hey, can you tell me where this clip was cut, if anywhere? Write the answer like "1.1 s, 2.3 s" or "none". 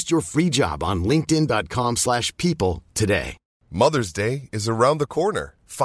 3.6 s